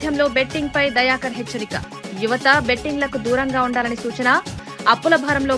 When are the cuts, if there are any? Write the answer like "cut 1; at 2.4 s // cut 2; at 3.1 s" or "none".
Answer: none